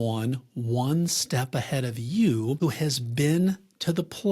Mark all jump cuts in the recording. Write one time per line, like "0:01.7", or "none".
0:02.6